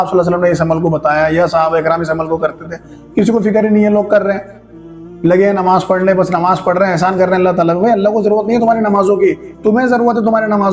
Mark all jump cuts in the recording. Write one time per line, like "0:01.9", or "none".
none